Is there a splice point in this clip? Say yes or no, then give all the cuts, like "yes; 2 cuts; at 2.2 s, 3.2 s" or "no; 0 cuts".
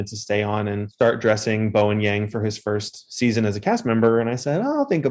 no; 0 cuts